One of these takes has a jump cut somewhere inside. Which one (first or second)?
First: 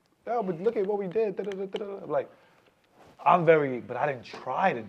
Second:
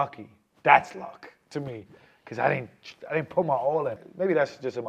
second